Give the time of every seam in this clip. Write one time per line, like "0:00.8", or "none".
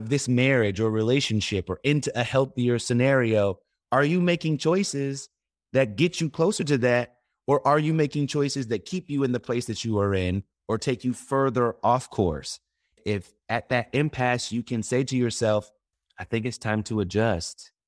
none